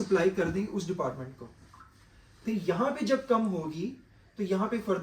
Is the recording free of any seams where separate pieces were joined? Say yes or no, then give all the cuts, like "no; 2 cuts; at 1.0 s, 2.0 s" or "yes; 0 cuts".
yes; 0 cuts